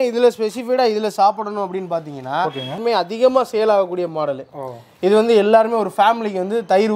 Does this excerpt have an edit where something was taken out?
yes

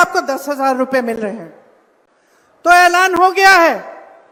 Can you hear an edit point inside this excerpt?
no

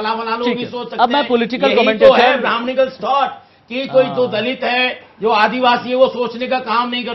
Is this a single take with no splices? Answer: yes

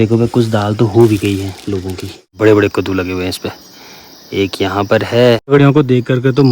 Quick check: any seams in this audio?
yes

